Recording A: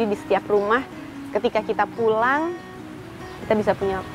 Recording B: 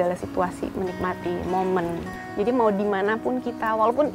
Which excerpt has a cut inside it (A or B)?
B